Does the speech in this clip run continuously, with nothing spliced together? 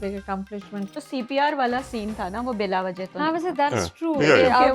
no; 1 cut; at 1.1 s

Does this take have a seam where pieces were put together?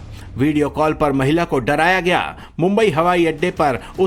no; 0 cuts

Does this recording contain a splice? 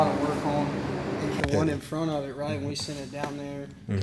yes; 1 cut; at 1.4 s

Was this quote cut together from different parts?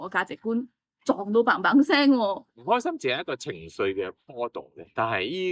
yes; 1 cut; at 2.4 s

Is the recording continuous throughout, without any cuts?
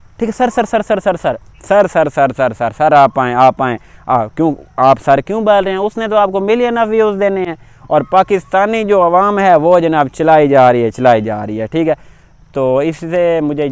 yes; 0 cuts

